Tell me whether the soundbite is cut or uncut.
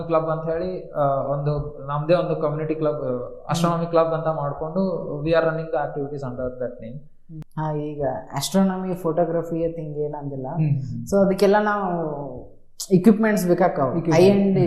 uncut